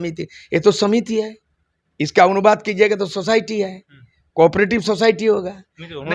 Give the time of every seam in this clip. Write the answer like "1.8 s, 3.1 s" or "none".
none

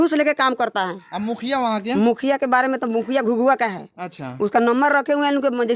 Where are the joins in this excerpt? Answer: none

